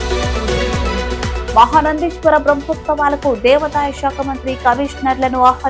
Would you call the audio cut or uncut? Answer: cut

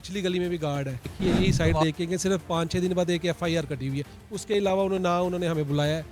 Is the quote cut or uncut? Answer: cut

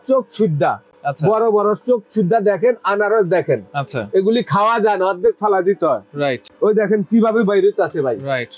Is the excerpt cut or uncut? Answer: uncut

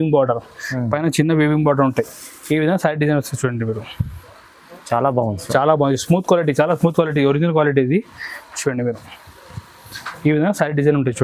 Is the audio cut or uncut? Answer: uncut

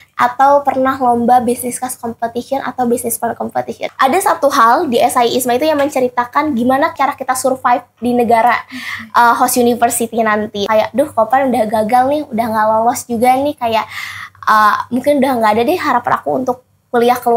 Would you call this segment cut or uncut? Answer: cut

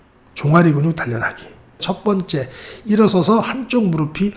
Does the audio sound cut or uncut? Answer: cut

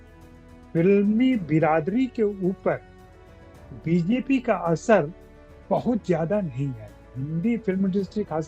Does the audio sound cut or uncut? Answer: cut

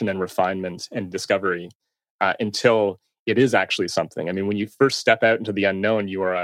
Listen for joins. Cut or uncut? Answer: uncut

